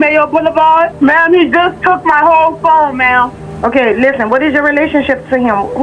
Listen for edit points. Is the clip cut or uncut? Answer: cut